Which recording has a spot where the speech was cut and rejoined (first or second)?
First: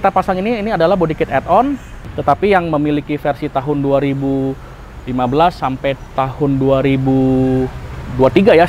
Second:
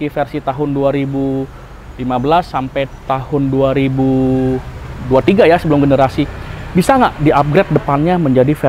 first